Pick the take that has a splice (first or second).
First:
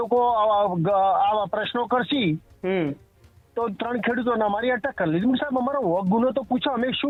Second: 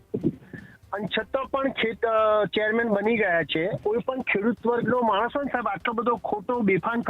second